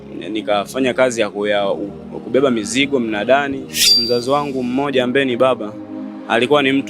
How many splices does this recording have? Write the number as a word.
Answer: one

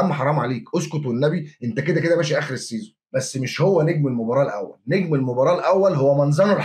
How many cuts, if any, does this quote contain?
one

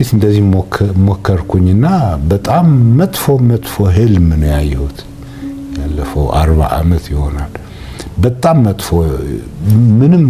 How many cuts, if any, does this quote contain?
zero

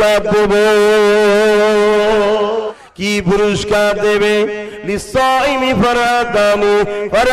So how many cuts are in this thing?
one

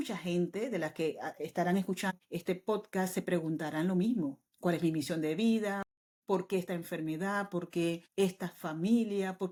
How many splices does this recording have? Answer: zero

